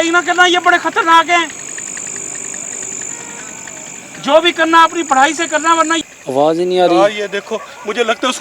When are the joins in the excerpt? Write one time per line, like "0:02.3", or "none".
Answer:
0:06.0